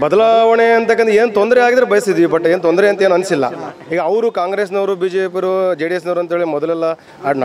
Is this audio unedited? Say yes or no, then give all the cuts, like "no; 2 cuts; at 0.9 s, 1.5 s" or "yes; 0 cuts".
yes; 0 cuts